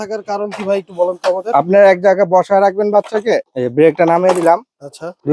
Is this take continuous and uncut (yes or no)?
no